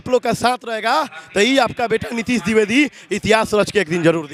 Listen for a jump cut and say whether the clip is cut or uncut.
uncut